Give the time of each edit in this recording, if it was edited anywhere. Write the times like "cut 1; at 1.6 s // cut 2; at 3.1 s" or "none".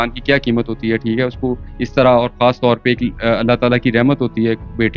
none